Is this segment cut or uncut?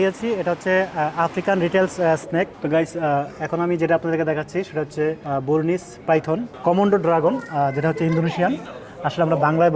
cut